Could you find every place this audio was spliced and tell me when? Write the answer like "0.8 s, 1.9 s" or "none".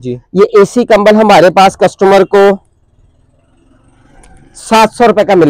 none